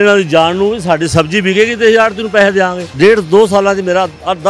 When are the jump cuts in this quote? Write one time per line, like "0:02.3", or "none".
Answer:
0:02.8

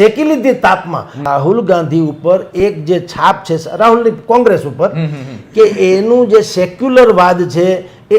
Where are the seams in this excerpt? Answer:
0:01.2

